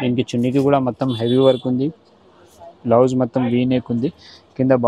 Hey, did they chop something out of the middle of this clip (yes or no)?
no